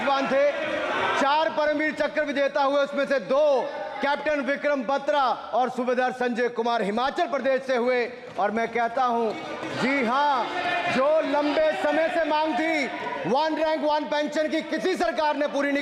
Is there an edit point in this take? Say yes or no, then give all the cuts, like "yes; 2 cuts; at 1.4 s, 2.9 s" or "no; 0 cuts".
no; 0 cuts